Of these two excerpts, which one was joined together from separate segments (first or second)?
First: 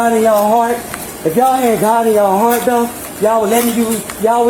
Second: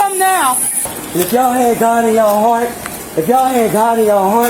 second